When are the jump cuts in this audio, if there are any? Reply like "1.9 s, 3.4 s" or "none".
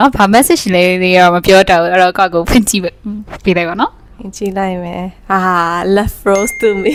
none